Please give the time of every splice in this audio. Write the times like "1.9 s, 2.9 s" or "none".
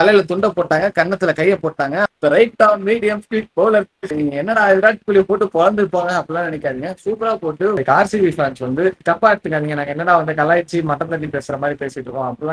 2.0 s, 4.1 s, 7.8 s